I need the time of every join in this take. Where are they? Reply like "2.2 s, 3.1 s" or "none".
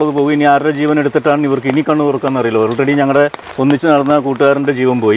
3.4 s

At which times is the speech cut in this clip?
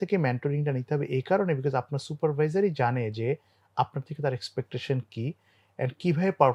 none

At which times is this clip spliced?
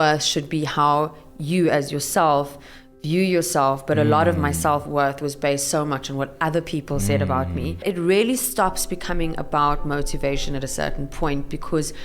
7.8 s

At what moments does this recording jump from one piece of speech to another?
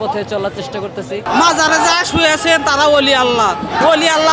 1.2 s

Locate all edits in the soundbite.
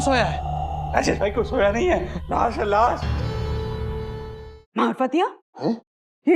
4.4 s

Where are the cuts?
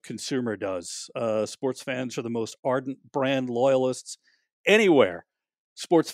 none

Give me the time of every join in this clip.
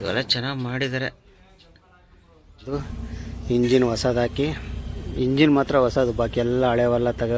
2.7 s

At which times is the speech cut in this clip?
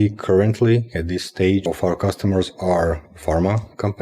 1.6 s

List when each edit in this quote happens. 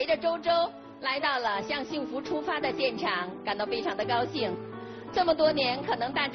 none

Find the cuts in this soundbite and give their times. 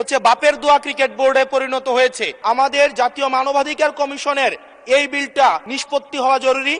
2.3 s, 5.7 s

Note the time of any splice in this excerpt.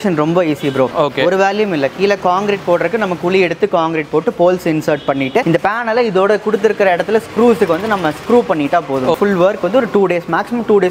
0.9 s, 5.4 s, 9.2 s

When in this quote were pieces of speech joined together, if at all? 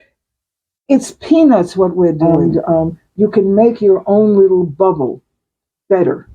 2.2 s

